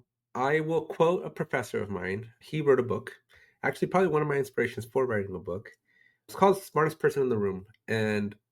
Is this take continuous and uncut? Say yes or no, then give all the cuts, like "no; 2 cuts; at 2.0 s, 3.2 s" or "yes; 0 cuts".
no; 2 cuts; at 2.4 s, 6.3 s